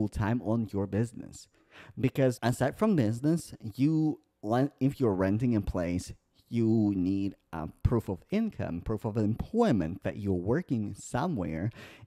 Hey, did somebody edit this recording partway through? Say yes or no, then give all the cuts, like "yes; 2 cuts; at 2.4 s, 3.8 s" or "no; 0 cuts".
yes; 1 cut; at 2.4 s